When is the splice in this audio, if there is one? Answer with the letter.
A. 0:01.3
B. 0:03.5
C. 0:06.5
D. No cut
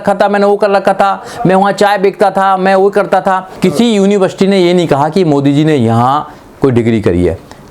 B